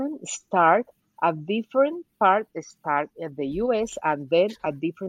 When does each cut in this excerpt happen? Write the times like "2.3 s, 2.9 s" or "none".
none

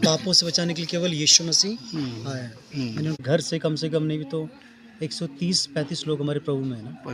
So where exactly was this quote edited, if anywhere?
3.2 s

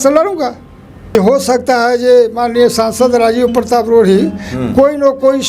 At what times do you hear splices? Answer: 1.1 s

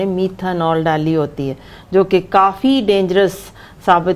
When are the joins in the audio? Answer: none

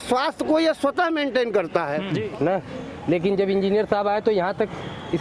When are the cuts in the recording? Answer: 2.1 s

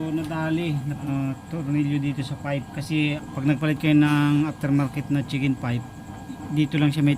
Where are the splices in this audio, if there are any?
1.0 s, 3.3 s

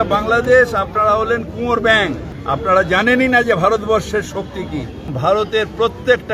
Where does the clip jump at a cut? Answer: 2.3 s, 5.0 s

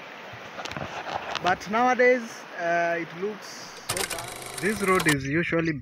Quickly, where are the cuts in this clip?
4.1 s

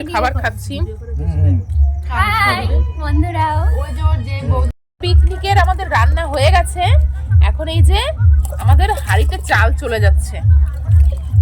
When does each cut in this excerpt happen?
4.8 s

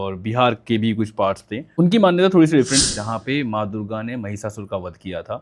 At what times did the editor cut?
1.7 s, 2.9 s

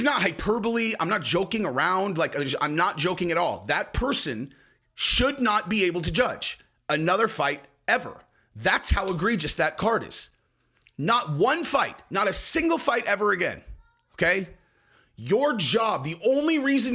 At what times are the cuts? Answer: none

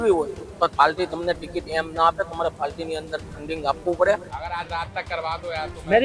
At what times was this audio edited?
4.3 s

